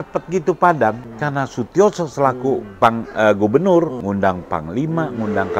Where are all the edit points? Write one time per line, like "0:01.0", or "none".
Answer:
0:01.1
0:04.0

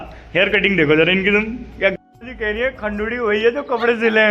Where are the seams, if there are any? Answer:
0:01.9

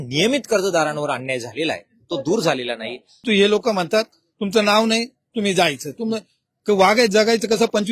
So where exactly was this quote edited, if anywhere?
0:03.2

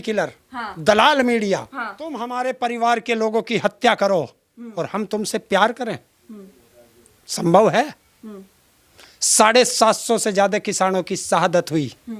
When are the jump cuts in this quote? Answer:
0:02.2

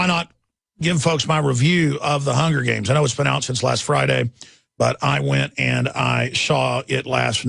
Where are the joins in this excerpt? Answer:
0:01.2

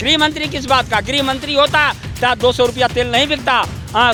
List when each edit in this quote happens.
none

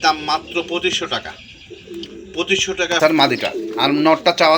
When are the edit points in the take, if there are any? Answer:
0:03.0

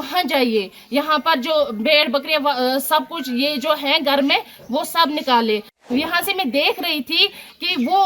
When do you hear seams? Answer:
0:05.7

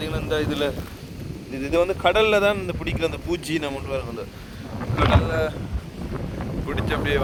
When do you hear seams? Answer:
none

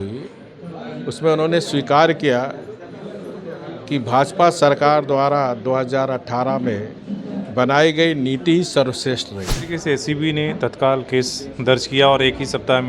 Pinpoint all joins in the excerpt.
0:09.7

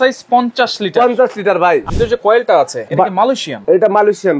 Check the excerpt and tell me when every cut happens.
0:01.9
0:03.3

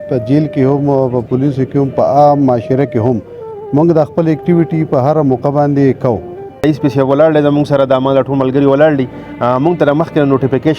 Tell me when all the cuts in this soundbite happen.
0:06.6

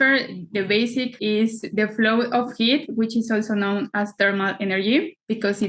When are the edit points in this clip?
0:01.2

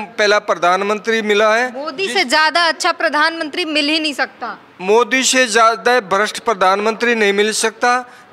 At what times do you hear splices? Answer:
none

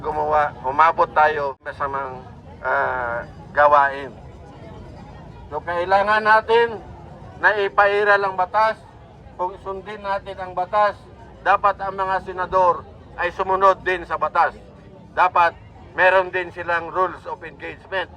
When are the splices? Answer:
0:01.7

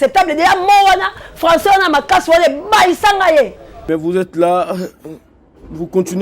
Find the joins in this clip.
0:03.7

